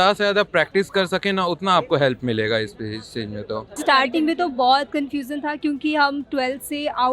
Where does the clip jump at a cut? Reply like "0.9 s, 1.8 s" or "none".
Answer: 3.7 s